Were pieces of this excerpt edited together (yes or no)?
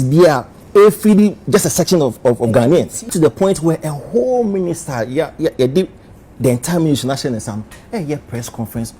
yes